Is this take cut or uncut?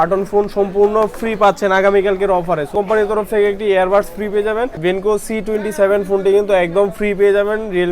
cut